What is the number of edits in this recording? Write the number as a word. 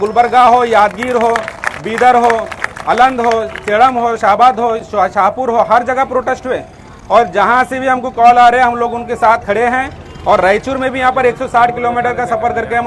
zero